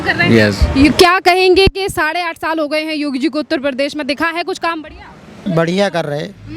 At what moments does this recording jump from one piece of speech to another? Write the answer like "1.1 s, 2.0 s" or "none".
5.3 s